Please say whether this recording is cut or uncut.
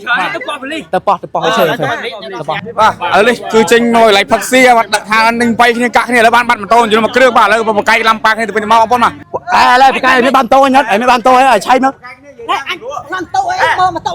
cut